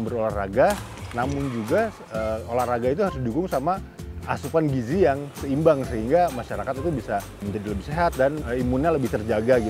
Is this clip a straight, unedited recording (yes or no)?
no